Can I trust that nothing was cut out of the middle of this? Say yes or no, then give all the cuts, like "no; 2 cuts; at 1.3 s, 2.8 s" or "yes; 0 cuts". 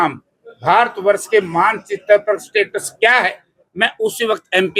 yes; 0 cuts